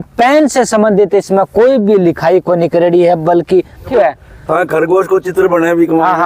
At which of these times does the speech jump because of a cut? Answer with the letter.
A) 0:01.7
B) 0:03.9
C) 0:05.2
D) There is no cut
B